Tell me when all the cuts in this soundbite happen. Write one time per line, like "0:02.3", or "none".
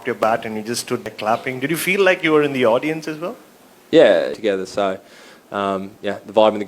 0:01.1
0:04.3